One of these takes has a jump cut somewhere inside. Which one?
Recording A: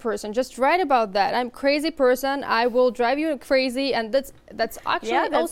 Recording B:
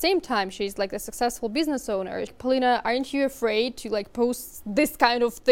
B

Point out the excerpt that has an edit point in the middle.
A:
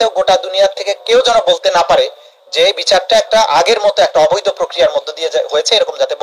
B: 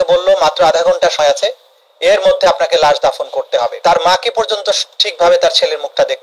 B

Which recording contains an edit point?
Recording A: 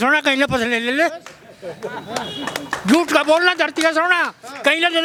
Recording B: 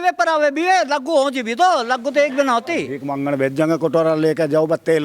B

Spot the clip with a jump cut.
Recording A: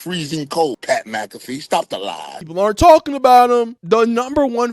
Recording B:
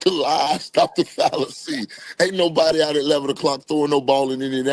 A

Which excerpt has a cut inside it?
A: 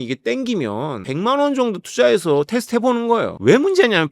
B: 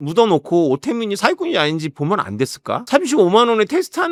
A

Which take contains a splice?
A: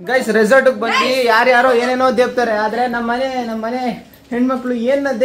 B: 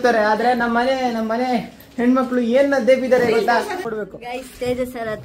B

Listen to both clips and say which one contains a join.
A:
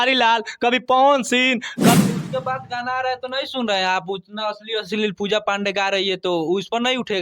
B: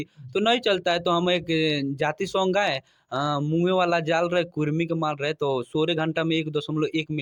A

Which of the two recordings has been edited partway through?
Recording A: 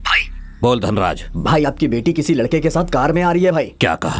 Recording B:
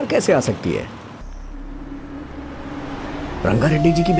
B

